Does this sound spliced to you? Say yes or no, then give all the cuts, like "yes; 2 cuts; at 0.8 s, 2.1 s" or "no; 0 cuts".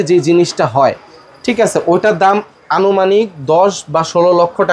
no; 0 cuts